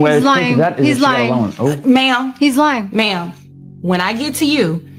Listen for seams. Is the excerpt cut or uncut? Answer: uncut